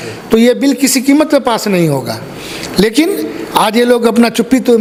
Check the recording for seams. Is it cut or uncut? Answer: uncut